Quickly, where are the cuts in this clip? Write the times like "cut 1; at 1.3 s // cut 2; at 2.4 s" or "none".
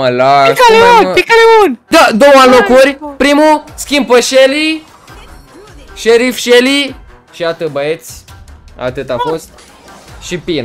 cut 1; at 1.9 s